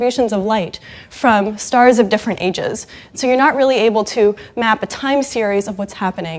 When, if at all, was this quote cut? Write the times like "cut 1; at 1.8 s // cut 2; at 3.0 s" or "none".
none